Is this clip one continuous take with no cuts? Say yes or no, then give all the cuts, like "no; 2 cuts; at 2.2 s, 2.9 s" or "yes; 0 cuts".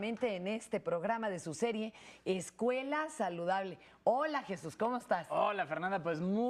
no; 1 cut; at 4.2 s